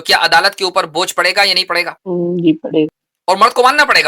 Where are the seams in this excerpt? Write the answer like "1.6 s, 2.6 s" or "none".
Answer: 2.0 s, 3.1 s